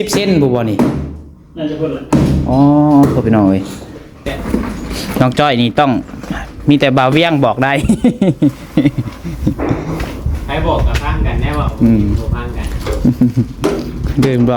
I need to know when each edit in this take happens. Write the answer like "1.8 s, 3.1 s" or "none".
4.3 s